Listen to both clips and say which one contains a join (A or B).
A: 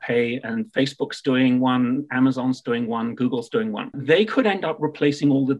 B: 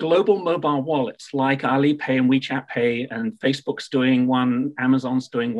A